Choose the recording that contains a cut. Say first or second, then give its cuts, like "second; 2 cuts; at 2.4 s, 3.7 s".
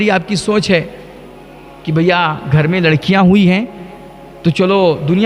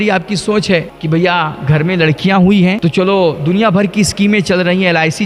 second; 2 cuts; at 0.9 s, 2.8 s